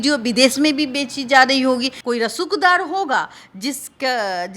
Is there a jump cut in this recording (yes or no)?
yes